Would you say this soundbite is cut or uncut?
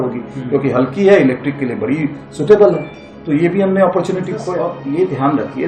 cut